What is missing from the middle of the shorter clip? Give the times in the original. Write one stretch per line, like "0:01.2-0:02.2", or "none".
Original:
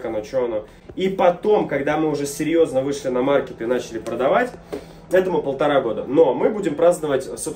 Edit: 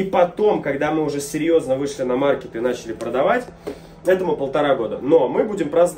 none